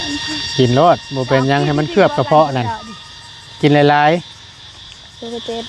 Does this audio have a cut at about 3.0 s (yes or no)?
no